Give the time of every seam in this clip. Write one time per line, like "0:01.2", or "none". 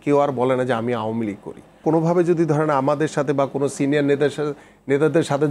0:01.8